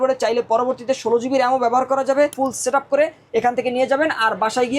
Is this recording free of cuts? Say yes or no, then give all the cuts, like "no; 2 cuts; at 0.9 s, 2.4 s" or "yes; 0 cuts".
no; 1 cut; at 2.3 s